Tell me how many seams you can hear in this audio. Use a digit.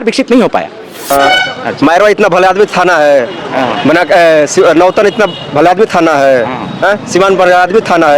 1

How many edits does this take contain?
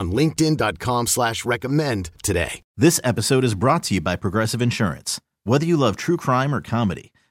1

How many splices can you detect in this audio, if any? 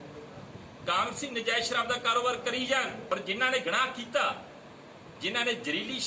1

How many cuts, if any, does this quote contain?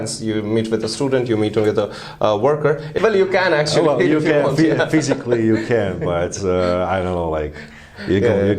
1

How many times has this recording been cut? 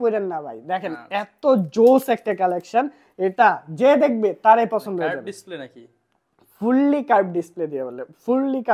0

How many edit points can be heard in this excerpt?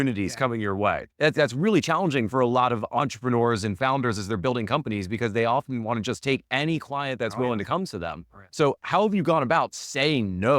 1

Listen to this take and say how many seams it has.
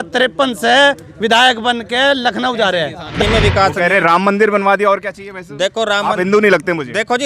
1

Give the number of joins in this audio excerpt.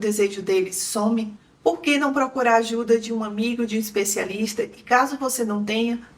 1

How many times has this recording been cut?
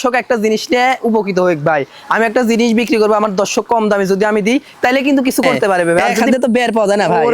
1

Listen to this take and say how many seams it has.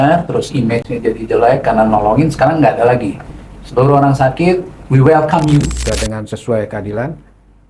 1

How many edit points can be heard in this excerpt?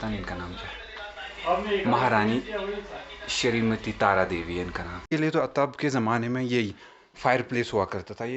1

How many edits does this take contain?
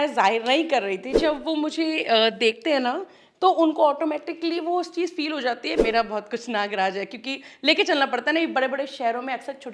2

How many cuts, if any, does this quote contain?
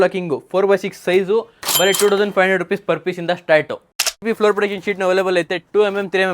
1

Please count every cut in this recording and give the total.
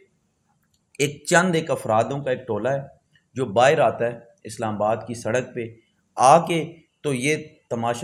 0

